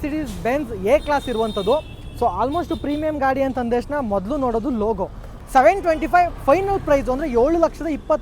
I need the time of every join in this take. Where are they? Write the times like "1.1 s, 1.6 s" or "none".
5.4 s